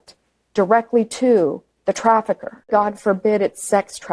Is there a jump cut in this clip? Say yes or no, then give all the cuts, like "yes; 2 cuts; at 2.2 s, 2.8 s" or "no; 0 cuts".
yes; 1 cut; at 2.7 s